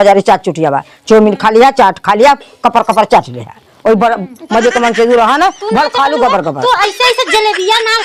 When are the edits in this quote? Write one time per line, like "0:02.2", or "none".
none